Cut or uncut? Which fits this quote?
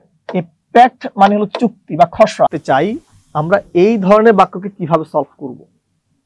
cut